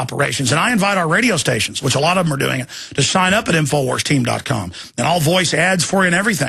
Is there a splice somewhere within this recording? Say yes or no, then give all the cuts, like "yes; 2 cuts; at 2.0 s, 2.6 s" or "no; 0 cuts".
yes; 1 cut; at 3.5 s